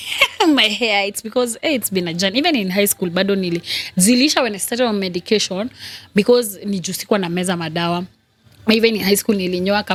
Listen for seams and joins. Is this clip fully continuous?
yes; 0 cuts

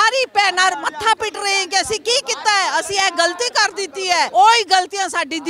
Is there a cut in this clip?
yes; 1 cut; at 4.3 s

